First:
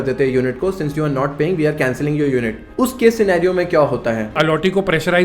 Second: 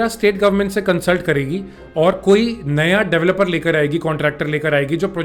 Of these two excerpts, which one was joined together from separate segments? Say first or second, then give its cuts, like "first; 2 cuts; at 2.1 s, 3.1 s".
first; 2 cuts; at 2.6 s, 4.3 s